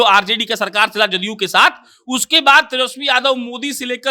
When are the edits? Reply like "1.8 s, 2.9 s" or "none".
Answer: none